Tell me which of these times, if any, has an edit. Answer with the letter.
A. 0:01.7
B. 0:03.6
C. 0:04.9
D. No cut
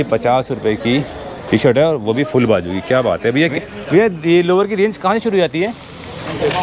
B